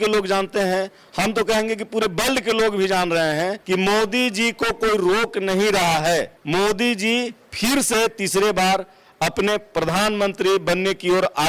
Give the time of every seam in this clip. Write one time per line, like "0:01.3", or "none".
0:03.6
0:06.4